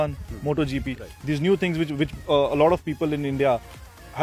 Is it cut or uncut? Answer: uncut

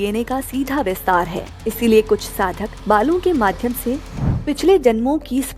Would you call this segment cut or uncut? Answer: cut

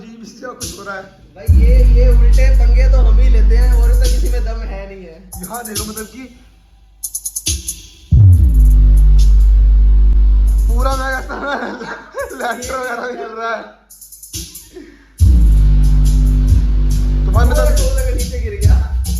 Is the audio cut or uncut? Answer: uncut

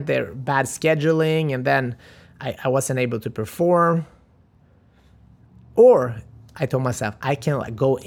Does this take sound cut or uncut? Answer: uncut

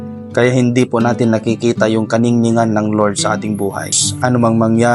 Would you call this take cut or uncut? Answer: cut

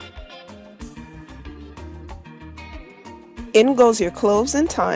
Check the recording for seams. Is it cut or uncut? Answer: cut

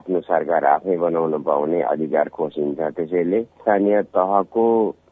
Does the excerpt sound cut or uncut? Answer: cut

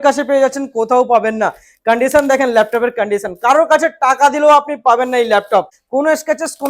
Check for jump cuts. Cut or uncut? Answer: cut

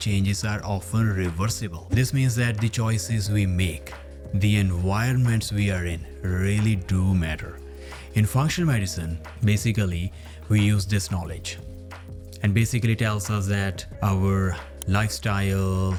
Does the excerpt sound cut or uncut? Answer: uncut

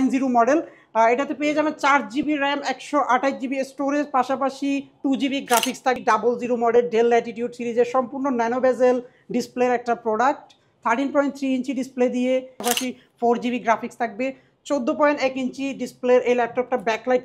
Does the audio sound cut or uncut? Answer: cut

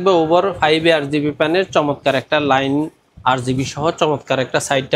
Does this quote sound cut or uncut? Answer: uncut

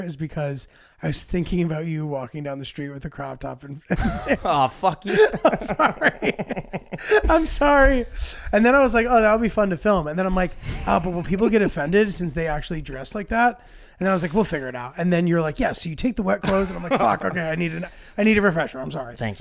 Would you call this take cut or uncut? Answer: uncut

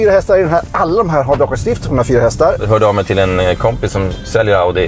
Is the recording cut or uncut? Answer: cut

